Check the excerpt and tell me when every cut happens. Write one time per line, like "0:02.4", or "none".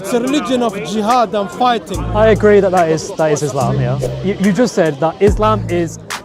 0:04.0